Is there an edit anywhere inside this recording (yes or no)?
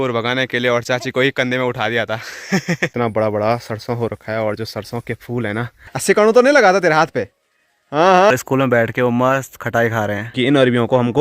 yes